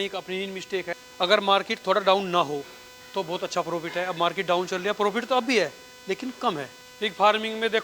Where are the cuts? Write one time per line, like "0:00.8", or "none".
0:01.0
0:06.8